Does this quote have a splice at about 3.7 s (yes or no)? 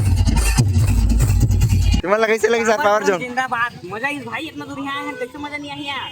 no